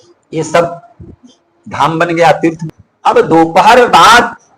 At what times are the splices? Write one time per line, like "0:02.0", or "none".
0:02.6